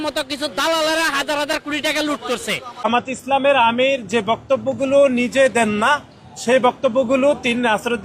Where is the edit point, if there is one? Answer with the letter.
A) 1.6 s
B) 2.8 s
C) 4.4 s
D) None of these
B